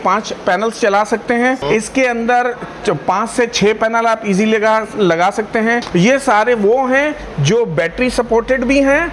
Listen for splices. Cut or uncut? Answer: cut